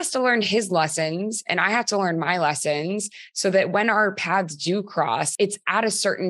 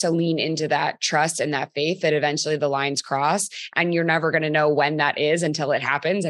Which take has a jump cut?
first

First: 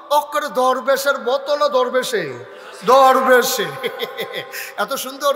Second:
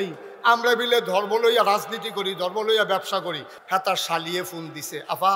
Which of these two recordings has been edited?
second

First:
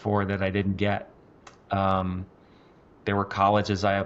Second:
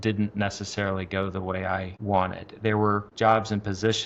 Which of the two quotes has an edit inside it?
second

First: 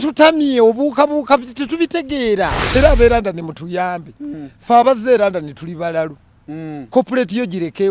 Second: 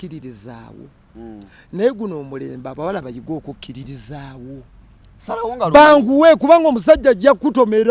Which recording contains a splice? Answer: first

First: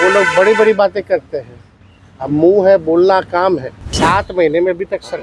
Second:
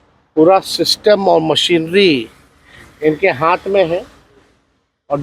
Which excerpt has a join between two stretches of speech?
first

